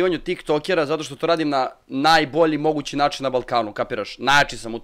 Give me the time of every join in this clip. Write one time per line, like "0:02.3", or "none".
none